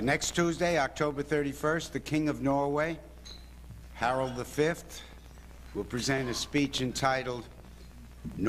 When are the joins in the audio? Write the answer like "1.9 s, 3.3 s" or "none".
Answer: none